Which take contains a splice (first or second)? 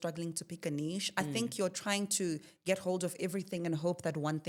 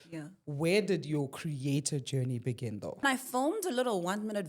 second